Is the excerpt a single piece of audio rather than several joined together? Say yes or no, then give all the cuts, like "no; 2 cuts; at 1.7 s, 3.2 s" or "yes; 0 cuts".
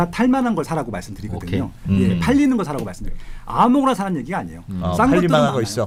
yes; 0 cuts